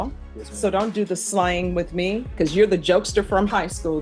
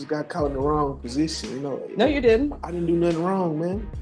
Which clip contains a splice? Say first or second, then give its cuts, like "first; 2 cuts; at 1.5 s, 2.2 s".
first; 1 cut; at 2.3 s